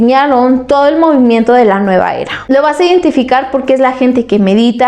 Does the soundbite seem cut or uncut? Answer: cut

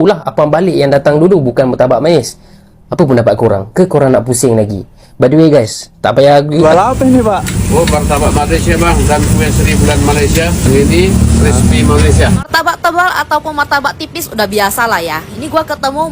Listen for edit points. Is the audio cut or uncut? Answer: cut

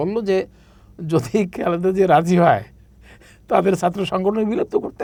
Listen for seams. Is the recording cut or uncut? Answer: uncut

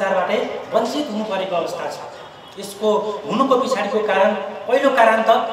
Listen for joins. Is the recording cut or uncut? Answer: uncut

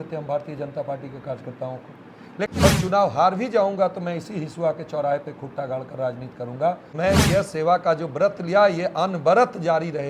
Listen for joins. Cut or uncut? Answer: cut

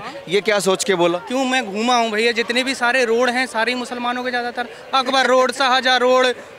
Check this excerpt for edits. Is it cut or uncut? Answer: uncut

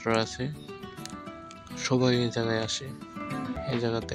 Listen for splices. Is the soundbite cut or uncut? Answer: uncut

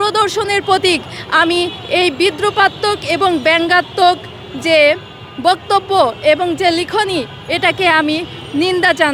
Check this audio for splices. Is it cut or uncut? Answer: uncut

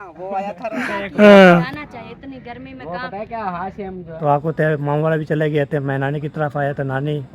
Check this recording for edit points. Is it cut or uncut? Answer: cut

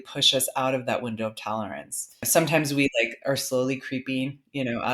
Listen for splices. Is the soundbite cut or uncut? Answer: cut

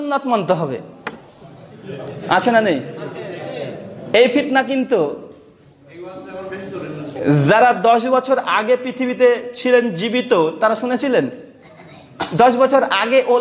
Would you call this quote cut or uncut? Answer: uncut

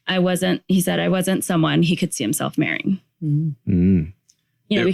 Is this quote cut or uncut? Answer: uncut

